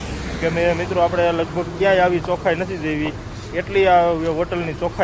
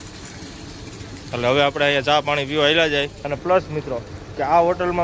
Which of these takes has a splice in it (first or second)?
second